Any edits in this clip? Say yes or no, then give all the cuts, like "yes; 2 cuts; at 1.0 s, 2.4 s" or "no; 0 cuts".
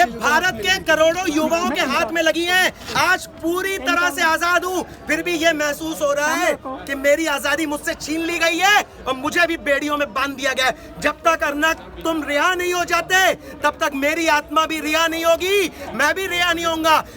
no; 0 cuts